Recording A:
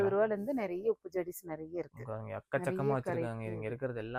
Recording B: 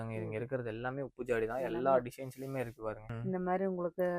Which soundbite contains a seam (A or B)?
B